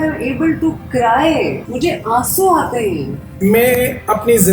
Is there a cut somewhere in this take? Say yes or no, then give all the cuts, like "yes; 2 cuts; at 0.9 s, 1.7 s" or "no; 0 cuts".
yes; 2 cuts; at 1.6 s, 3.2 s